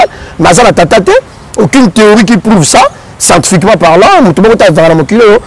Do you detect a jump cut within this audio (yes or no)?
no